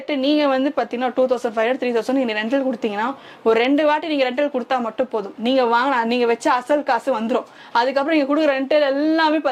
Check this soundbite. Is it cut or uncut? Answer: uncut